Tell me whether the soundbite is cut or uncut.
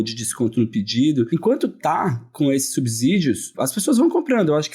cut